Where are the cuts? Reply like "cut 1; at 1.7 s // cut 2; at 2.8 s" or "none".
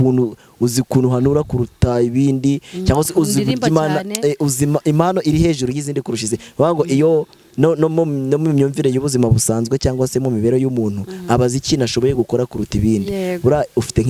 none